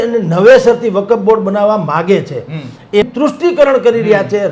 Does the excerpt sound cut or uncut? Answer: cut